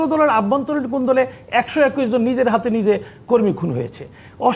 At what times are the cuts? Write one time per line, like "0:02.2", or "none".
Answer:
none